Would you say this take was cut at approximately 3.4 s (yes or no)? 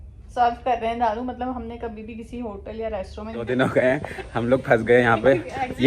yes